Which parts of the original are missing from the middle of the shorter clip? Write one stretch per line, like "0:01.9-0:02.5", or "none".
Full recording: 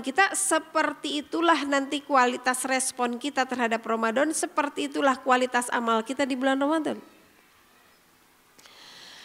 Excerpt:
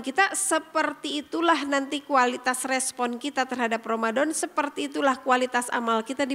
none